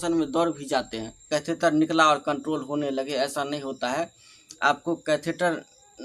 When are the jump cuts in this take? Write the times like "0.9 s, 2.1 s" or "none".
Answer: 1.2 s